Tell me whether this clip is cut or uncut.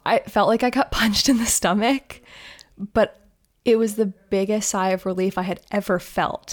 uncut